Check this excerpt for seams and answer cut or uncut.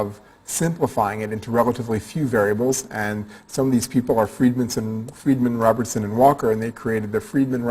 cut